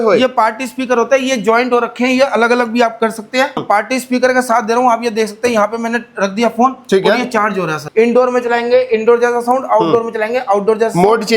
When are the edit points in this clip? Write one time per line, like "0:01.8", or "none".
0:03.6
0:07.8